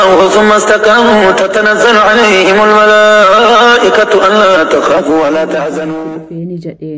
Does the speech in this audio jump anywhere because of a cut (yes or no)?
yes